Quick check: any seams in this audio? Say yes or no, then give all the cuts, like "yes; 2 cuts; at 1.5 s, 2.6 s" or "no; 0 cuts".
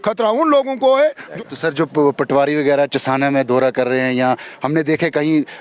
yes; 1 cut; at 1.2 s